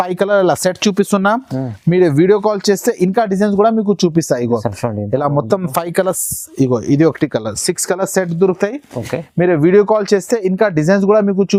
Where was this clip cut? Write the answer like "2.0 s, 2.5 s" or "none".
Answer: none

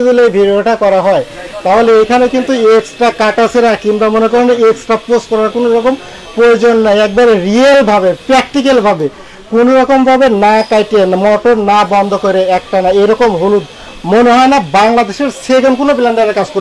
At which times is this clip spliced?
none

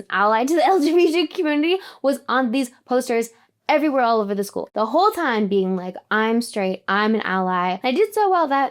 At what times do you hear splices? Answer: 4.6 s, 7.8 s

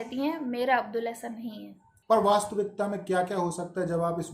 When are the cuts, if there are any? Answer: 1.9 s

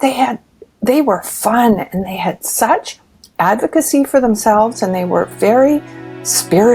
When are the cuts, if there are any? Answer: none

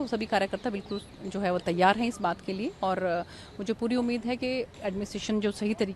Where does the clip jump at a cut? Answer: none

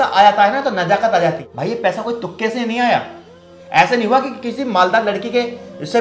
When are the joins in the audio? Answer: none

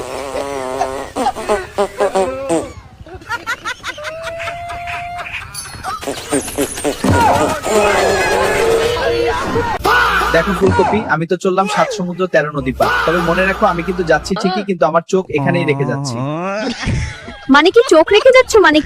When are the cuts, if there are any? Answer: none

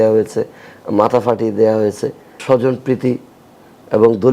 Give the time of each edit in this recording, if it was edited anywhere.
2.4 s

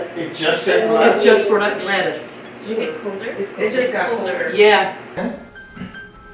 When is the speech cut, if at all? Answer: 5.2 s

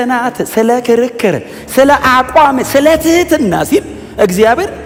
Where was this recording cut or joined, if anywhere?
none

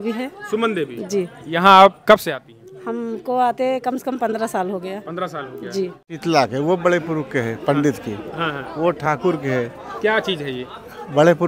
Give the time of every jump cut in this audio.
6.2 s

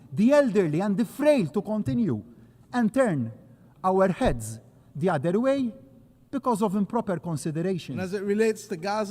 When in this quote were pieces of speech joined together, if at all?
8.0 s

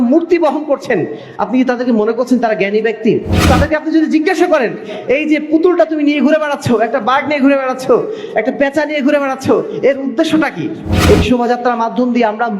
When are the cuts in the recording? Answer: 3.4 s, 10.9 s

